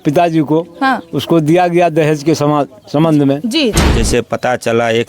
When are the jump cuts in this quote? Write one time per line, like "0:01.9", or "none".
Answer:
0:03.9